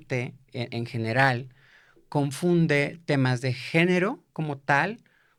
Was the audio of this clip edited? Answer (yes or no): no